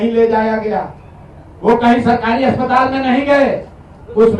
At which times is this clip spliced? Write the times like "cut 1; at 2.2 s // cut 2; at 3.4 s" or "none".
none